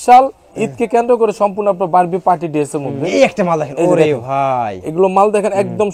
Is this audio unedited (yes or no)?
no